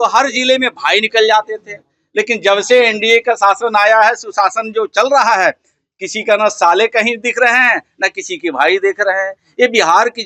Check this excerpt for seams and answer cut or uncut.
uncut